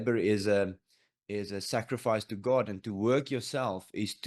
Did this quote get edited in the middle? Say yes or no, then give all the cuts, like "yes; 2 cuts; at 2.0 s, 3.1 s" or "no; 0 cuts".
no; 0 cuts